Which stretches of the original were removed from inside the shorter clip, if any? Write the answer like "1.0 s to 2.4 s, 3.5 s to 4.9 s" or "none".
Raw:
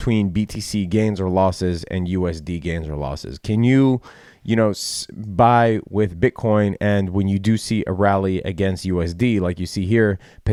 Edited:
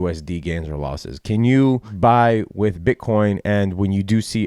4.1 s to 5.2 s